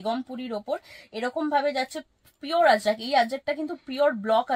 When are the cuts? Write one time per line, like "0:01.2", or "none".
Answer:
none